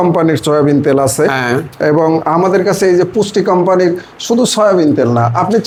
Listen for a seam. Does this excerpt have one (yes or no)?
no